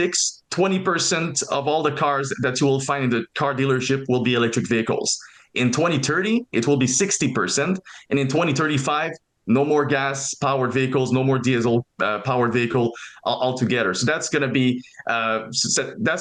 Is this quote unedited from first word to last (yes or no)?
yes